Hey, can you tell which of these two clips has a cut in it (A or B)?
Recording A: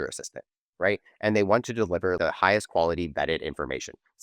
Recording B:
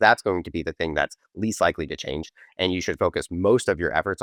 A